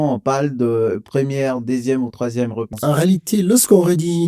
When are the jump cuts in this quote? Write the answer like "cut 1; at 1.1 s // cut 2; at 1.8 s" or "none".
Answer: cut 1; at 2.7 s